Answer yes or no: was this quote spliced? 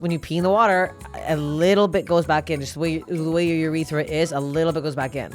no